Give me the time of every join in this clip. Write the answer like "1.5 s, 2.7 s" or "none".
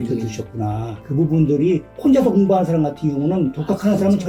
none